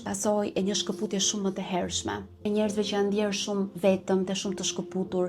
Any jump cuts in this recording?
yes; 1 cut; at 2.4 s

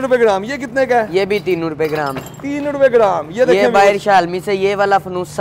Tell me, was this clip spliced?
no; 0 cuts

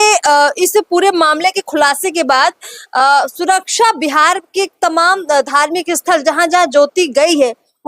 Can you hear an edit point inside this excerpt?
no; 0 cuts

